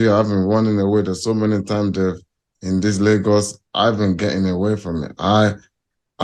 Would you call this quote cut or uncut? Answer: uncut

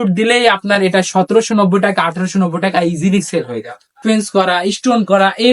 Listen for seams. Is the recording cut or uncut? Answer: cut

